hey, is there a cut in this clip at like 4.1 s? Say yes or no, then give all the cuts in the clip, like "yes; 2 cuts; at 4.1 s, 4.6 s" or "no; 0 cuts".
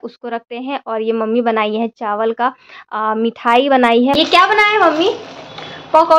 yes; 1 cut; at 4.1 s